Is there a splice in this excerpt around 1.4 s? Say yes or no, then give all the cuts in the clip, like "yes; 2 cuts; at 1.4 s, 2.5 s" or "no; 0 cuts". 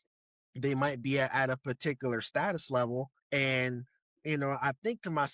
no; 1 cut; at 3.2 s